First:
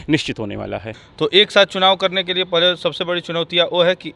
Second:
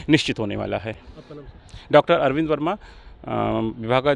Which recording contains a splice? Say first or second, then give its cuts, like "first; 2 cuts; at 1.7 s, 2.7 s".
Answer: first; 1 cut; at 1.0 s